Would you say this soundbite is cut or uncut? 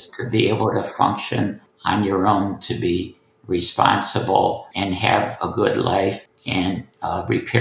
cut